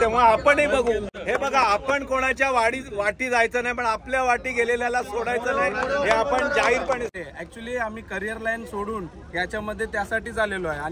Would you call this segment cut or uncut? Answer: cut